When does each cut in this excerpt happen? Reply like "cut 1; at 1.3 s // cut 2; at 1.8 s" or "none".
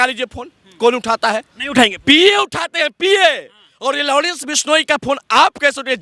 none